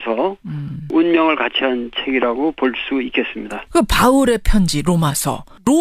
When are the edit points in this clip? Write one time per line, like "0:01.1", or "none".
0:02.4